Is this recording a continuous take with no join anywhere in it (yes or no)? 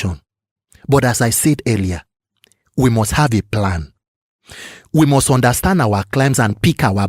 yes